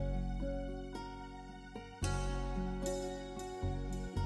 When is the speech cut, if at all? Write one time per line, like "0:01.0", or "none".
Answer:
none